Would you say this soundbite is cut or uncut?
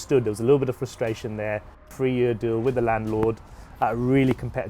cut